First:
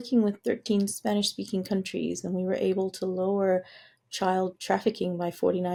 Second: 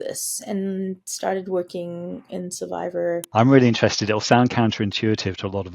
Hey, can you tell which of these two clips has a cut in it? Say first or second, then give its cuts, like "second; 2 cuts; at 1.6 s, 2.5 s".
second; 1 cut; at 3.3 s